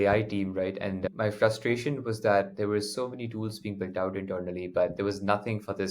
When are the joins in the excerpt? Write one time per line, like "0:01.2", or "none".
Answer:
0:01.0